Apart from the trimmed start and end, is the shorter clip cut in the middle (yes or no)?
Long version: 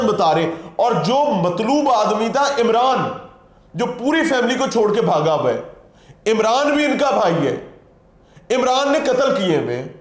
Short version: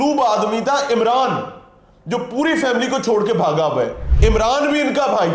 yes